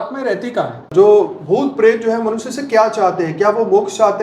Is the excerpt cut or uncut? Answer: cut